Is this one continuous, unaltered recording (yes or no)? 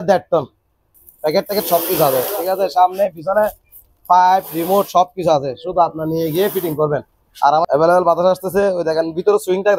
no